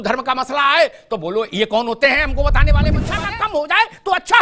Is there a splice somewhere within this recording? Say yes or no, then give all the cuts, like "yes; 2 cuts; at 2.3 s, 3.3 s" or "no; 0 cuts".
yes; 1 cut; at 2.9 s